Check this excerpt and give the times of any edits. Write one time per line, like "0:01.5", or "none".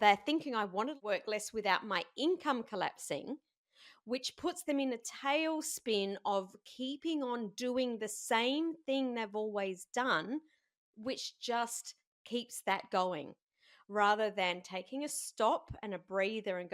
0:01.0